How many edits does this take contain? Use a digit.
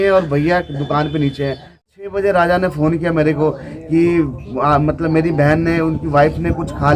1